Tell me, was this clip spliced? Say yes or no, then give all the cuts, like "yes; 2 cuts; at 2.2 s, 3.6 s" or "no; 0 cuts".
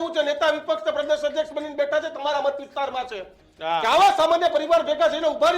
no; 0 cuts